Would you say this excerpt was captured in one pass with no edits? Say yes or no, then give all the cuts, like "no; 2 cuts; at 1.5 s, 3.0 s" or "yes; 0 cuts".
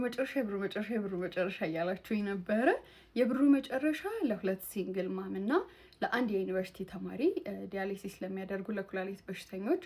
yes; 0 cuts